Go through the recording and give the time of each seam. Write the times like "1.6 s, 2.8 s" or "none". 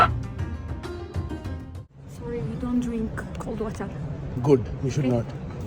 1.7 s